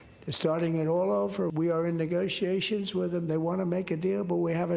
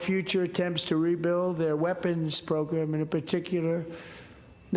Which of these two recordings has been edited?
first; 1 cut; at 1.5 s

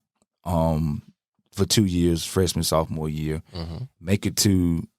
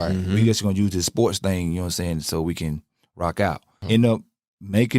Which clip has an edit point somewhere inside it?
second; 1 cut; at 3.8 s

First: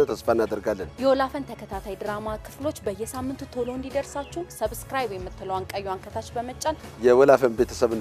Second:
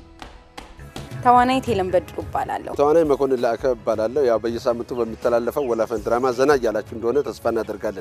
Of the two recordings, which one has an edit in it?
second; 1 cut; at 2.6 s

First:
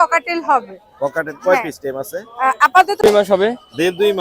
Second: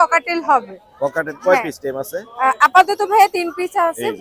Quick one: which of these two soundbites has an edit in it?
first; 1 cut; at 3.1 s

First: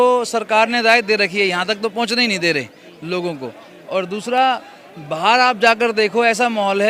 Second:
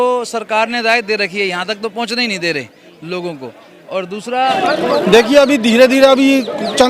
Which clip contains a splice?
second; 1 cut; at 4.4 s

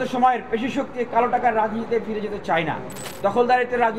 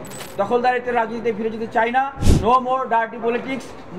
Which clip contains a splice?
second; 1 cut; at 2.2 s

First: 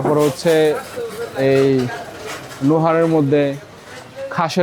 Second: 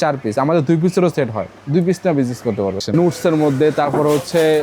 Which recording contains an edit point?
second; 1 cut; at 2.9 s

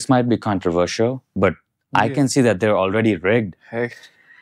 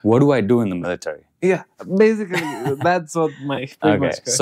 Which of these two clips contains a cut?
first; 1 cut; at 1.2 s

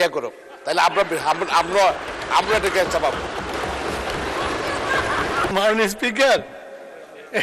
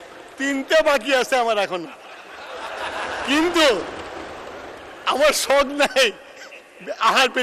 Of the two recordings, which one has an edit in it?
first; 1 cut; at 5.5 s

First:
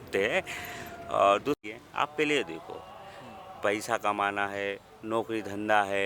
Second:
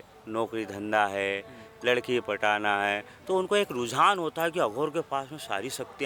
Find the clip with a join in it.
first; 1 cut; at 1.6 s

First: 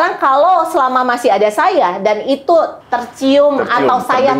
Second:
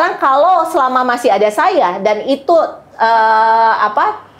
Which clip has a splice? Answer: first; 1 cut; at 2.8 s

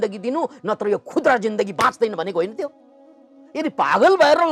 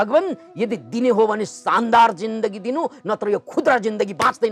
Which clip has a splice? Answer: first; 1 cut; at 3.4 s

